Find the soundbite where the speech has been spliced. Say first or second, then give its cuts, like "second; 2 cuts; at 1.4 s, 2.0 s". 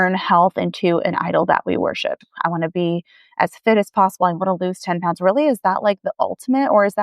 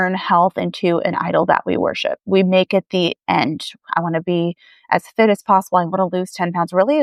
first; 1 cut; at 2.2 s